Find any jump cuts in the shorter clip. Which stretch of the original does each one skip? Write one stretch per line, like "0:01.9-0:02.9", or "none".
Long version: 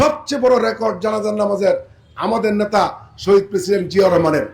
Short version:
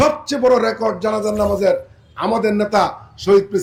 none

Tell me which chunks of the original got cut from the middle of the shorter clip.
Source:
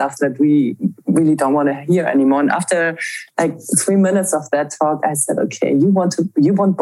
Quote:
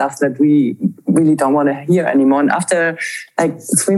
none

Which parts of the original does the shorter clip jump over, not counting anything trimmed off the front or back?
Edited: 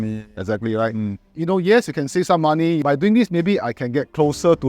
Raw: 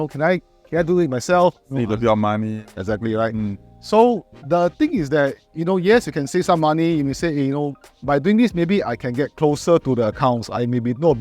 0:03.7-0:05.5
0:07.0-0:08.0

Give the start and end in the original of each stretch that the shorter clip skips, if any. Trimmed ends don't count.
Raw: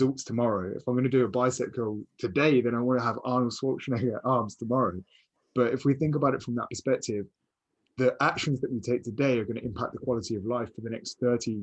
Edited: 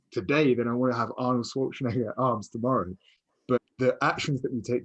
0:05.6-0:07.8

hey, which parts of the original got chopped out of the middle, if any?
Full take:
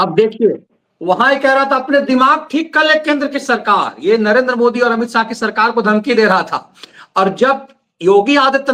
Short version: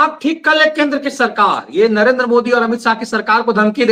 none

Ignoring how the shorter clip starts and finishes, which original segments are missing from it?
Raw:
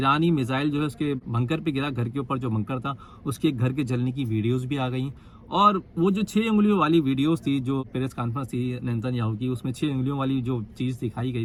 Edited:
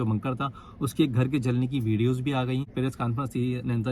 0:05.2-0:07.9

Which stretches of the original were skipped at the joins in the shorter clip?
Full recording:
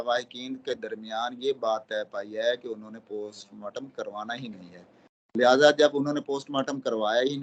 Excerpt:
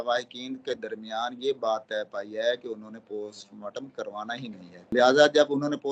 0:04.8-0:05.2

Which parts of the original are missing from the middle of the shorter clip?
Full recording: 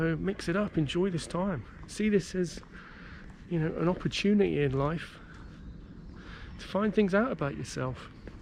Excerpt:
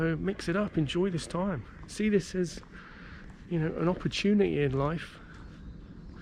none

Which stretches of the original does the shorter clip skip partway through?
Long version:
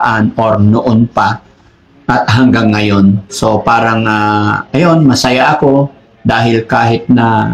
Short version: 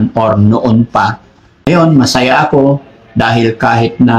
0:01.8-0:04.6

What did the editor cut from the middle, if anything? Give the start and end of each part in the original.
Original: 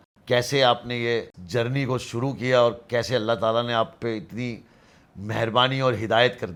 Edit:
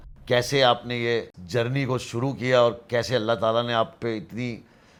none

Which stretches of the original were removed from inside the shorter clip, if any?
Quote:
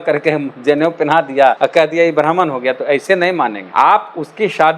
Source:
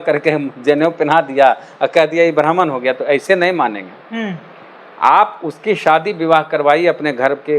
0:01.6-0:01.8
0:03.8-0:04.9

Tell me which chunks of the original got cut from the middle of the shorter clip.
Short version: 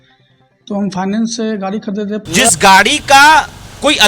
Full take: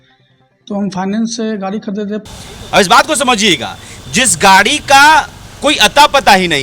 0:02.2-0:04.0

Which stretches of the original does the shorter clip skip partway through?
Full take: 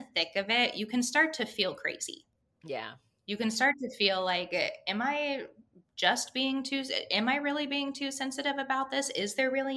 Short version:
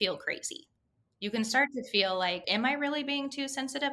0:02.5-0:03.0
0:04.5-0:07.0

